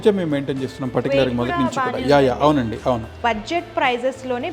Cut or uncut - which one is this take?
cut